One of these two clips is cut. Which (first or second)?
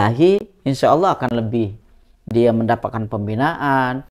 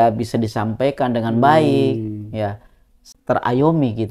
second